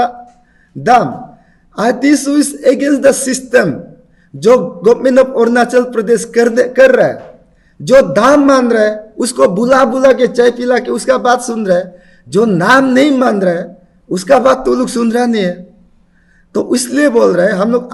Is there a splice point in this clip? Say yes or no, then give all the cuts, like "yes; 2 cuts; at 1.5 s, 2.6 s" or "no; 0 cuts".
no; 0 cuts